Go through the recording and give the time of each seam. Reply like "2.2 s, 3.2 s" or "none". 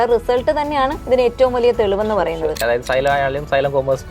1.0 s, 2.6 s